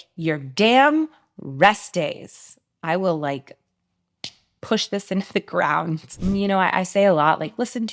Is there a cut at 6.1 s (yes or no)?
yes